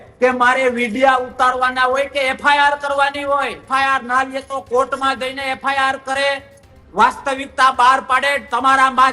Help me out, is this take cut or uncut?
cut